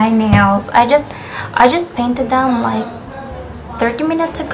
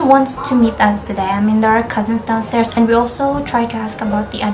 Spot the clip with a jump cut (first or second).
second